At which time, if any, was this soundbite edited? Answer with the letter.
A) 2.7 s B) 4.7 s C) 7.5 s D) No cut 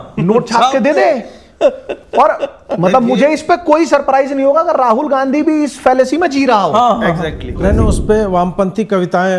C